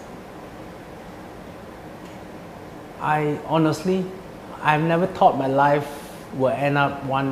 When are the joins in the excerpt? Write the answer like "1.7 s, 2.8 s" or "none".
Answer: 3.8 s